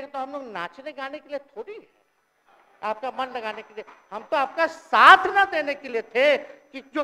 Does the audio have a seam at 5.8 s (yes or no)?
no